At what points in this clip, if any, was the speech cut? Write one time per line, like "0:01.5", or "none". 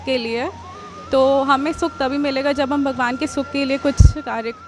none